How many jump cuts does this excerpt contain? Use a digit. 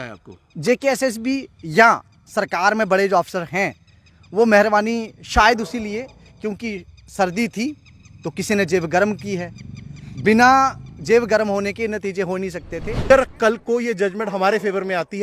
1